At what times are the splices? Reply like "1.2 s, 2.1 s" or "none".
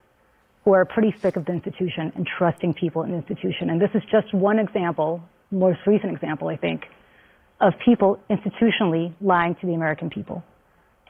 none